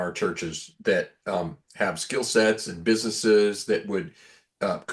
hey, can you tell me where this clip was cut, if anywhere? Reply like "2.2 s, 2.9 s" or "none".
none